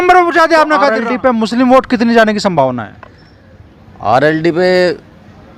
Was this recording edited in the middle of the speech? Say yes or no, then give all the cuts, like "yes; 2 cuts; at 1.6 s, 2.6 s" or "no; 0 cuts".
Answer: yes; 1 cut; at 1.0 s